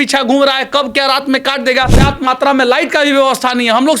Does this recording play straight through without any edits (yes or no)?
no